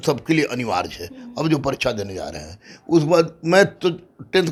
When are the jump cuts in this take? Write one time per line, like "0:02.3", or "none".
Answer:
none